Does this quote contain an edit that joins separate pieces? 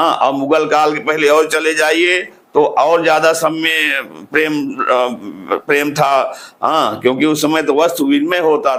no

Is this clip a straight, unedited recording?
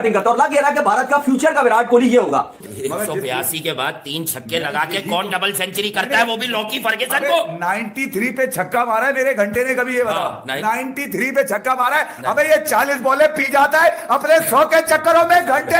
no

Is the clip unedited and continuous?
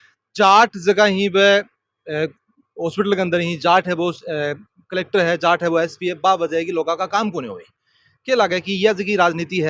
yes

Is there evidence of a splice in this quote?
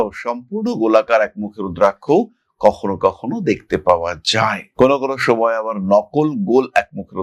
no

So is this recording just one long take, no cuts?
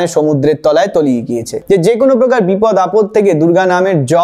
no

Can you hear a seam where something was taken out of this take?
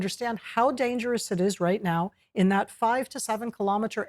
yes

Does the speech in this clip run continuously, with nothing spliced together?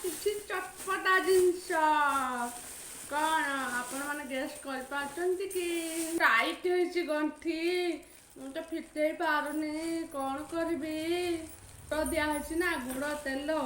no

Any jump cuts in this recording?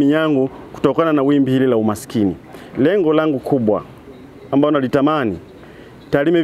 no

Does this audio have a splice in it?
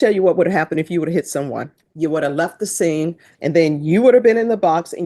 yes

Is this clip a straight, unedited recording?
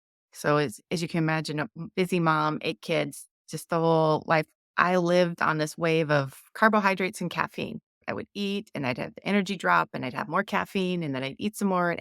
no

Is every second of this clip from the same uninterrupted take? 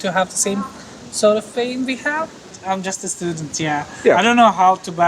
no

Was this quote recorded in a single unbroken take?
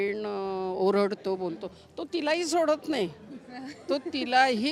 yes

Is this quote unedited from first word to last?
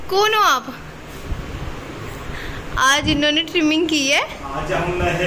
yes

